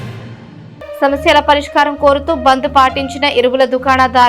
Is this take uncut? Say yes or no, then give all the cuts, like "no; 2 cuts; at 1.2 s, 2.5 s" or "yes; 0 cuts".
yes; 0 cuts